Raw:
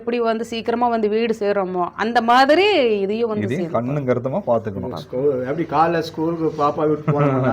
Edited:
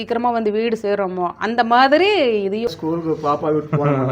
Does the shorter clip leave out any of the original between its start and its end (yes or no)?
yes